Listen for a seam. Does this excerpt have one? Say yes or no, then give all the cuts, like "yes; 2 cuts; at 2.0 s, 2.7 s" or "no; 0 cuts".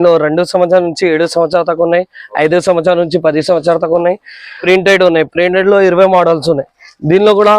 yes; 1 cut; at 4.6 s